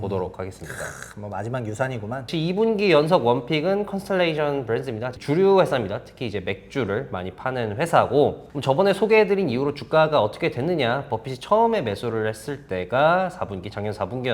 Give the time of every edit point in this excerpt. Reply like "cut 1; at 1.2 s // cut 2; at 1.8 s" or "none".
cut 1; at 2.3 s // cut 2; at 5.1 s // cut 3; at 8.5 s